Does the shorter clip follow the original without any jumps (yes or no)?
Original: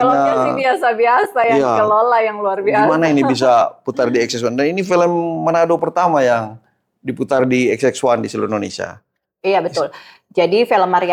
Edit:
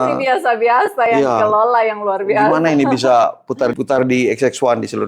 no